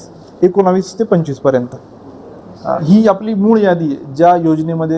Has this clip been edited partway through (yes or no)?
yes